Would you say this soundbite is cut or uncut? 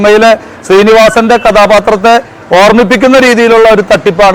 uncut